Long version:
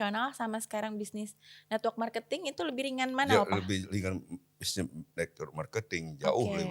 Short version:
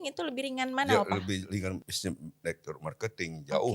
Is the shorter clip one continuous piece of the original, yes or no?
no